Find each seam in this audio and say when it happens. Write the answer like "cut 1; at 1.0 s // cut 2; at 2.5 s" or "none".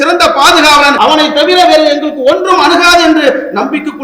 cut 1; at 0.9 s